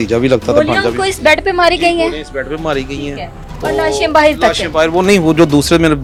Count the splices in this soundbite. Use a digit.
0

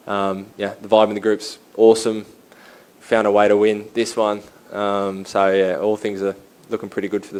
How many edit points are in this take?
0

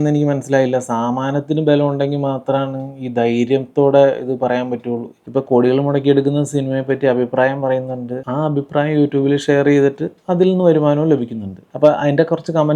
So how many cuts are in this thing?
2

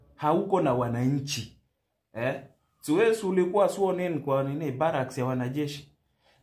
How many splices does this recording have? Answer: 0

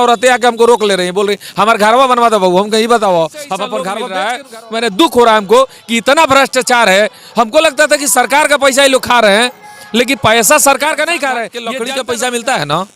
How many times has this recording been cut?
2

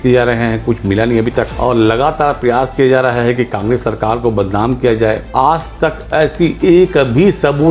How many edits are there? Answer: 2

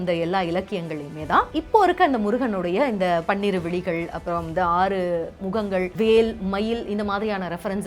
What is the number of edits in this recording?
1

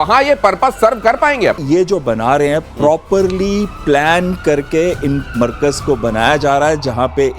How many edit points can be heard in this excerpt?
1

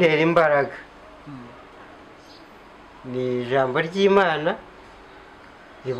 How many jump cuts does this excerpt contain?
0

